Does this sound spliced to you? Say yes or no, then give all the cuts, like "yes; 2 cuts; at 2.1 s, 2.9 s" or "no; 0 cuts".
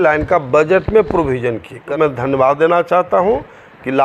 yes; 1 cut; at 1.9 s